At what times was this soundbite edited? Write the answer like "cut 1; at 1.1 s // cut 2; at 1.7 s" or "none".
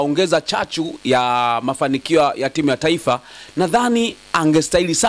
none